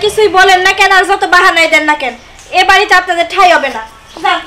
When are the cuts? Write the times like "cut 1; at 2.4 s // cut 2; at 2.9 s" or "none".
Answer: none